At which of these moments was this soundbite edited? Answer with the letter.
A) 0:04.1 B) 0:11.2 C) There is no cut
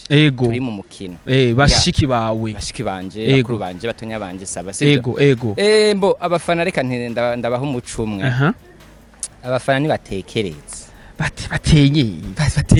C